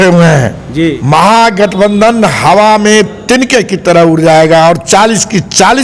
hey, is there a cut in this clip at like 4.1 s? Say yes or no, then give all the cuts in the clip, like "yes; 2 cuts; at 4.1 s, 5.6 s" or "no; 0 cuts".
no; 1 cut; at 1.0 s